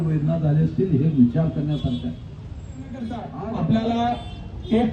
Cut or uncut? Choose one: cut